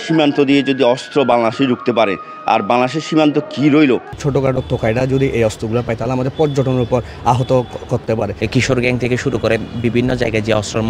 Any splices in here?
yes; 2 cuts; at 4.2 s, 8.3 s

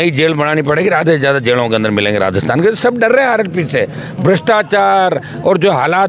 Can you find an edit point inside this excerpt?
no; 0 cuts

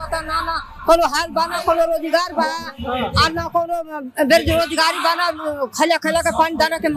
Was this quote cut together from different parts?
no; 0 cuts

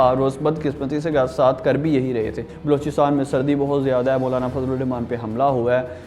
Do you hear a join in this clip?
yes; 1 cut; at 2.5 s

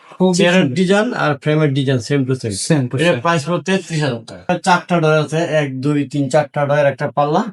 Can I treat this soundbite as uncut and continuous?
no; 1 cut; at 4.5 s

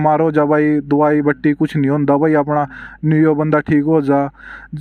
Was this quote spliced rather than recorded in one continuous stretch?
no; 0 cuts

